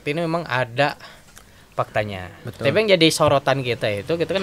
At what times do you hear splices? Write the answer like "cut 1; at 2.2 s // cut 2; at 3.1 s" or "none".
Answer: cut 1; at 2.4 s